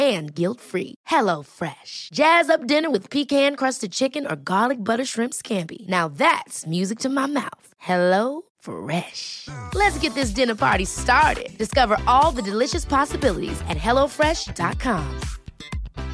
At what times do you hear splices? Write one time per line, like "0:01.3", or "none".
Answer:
none